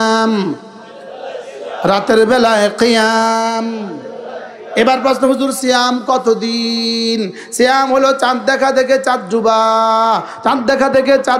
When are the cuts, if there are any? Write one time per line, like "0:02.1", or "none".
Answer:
none

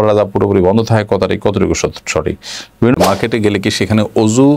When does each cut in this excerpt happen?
0:02.9

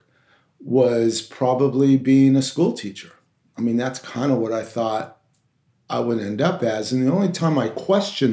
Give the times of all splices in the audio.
none

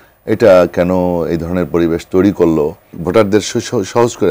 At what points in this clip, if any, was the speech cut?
0:02.9

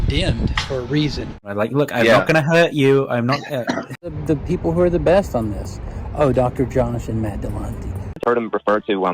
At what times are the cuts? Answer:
0:01.4
0:04.1
0:08.2

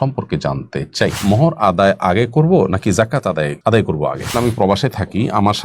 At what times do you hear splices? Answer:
0:01.2
0:03.5
0:04.3

